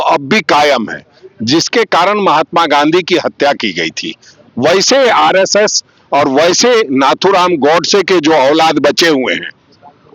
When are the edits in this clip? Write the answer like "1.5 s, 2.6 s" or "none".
none